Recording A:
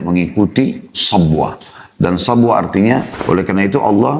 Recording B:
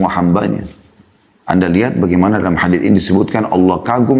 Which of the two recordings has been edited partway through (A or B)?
A